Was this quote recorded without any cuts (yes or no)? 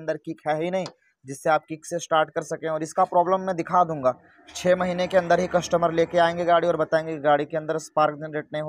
yes